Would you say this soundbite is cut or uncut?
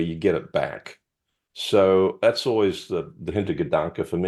uncut